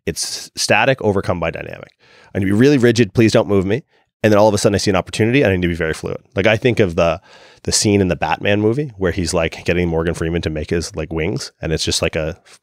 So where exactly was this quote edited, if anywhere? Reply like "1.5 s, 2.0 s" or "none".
none